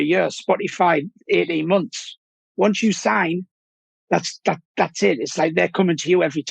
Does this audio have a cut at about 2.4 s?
yes; 1 cut; at 2.4 s

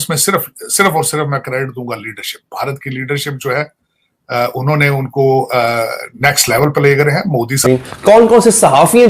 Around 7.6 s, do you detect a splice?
yes; 1 cut; at 7.6 s

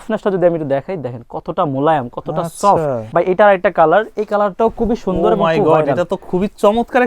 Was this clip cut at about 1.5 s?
no; 1 cut; at 3.0 s

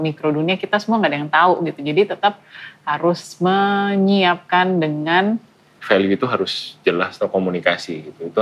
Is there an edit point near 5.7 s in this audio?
yes; 1 cut; at 5.7 s

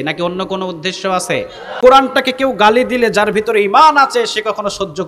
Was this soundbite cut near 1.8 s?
yes; 1 cut; at 1.8 s

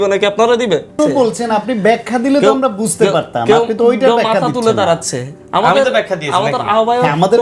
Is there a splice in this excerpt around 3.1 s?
no; 1 cut; at 1.0 s

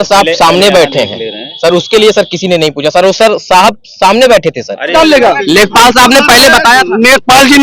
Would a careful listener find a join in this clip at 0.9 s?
no; 1 cut; at 4.9 s

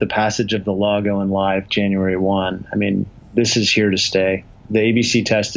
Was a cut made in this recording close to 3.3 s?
no; 0 cuts

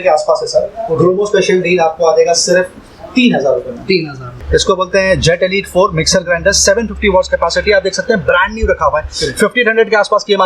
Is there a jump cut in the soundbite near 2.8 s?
no; 1 cut; at 4.4 s

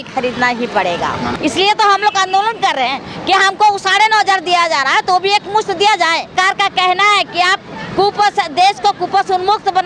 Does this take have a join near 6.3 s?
yes; 2 cuts; at 1.3 s, 6.3 s

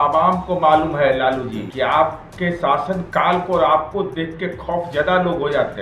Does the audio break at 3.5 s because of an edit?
no; 2 cuts; at 1.7 s, 2.2 s

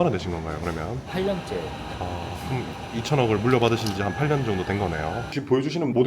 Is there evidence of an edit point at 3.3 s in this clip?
no; 2 cuts; at 1.1 s, 5.3 s

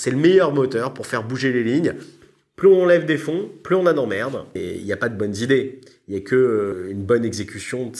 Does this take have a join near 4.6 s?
yes; 2 cuts; at 2.2 s, 4.6 s

